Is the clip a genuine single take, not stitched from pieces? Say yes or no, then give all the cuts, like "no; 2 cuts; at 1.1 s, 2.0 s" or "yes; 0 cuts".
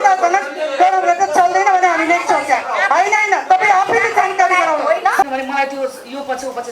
no; 1 cut; at 5.2 s